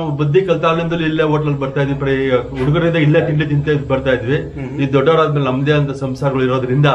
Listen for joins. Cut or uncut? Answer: uncut